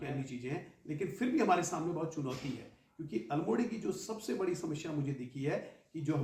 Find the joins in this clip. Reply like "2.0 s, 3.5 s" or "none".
none